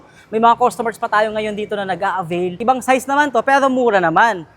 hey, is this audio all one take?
no; 1 cut; at 2.6 s

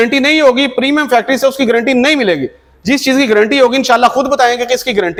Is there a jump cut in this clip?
no; 0 cuts

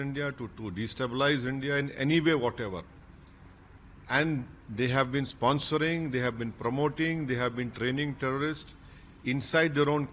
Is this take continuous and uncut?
yes; 0 cuts

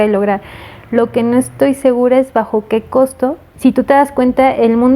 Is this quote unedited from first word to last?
no; 1 cut; at 3.5 s

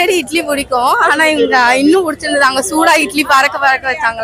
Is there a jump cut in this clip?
no; 0 cuts

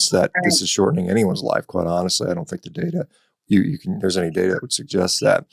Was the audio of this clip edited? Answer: no; 0 cuts

